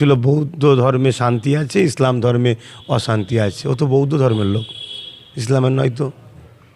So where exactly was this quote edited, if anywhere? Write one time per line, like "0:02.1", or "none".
none